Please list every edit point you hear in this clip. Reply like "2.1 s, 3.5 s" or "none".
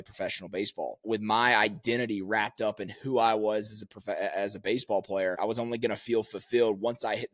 1.0 s, 5.4 s